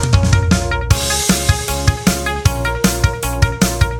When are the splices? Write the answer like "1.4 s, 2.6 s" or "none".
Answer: none